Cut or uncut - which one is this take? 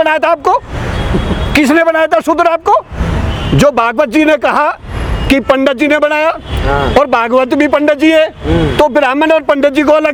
uncut